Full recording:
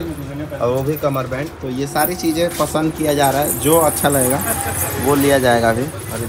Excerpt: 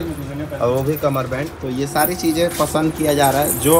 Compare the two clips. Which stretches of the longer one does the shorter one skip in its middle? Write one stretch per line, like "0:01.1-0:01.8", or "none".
none

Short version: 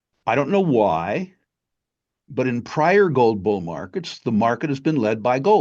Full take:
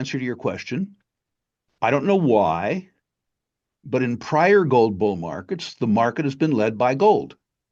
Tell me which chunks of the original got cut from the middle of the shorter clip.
none

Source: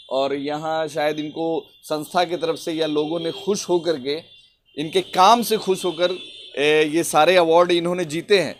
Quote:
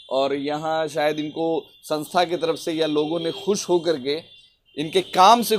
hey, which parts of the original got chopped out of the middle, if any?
none

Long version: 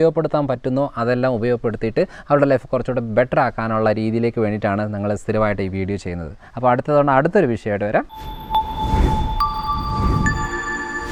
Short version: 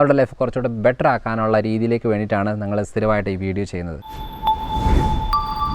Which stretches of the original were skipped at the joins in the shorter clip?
0:06.4-0:08.2

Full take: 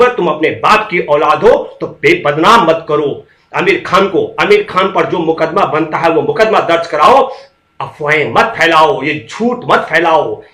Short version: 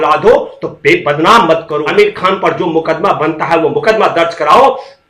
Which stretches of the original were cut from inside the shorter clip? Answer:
0:03.0-0:04.4

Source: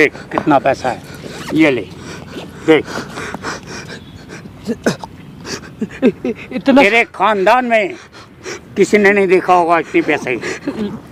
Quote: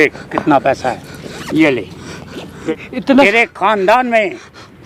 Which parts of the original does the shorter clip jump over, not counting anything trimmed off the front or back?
0:02.6-0:06.2

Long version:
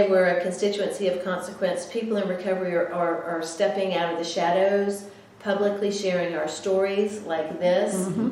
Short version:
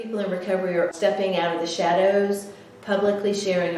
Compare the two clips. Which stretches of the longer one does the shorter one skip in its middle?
0:02.9-0:03.5

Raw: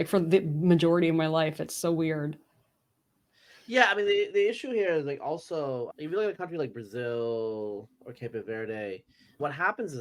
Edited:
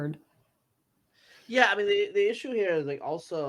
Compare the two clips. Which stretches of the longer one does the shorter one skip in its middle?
none

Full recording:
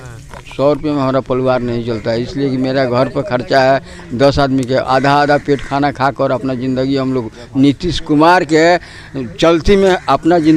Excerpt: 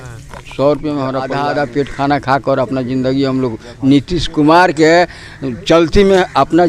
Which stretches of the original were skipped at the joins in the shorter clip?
0:01.3-0:05.1

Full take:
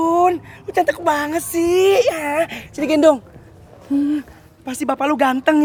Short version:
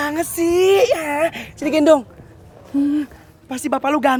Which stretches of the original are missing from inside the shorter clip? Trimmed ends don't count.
none

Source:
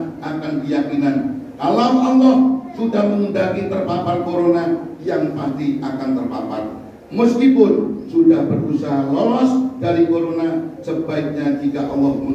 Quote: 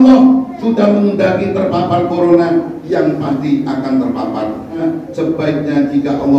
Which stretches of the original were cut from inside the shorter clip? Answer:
0:07.0-0:10.5

